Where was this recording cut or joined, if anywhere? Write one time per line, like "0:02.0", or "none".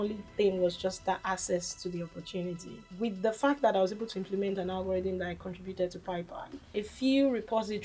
0:02.9
0:06.8